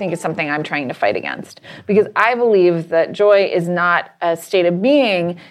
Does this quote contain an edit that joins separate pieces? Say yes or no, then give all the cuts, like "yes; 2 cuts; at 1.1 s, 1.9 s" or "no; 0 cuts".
no; 0 cuts